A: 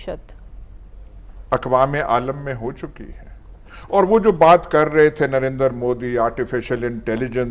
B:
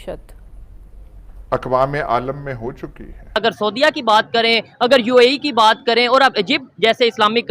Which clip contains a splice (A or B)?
B